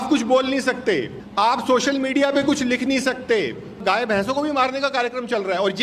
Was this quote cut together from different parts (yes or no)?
yes